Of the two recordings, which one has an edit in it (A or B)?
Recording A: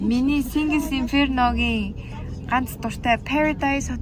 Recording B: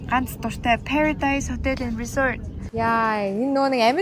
B